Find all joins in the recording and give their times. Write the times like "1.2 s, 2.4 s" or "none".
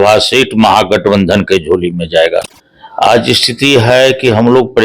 2.6 s